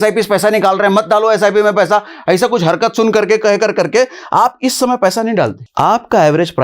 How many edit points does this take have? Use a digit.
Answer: 1